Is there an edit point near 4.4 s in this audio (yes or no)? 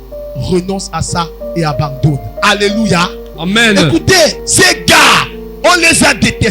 yes